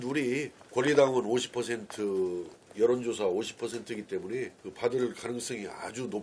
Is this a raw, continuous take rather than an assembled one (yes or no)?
yes